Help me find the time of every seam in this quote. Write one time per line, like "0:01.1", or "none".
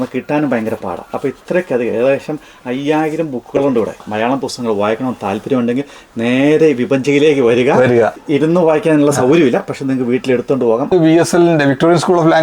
0:04.0
0:08.2
0:10.9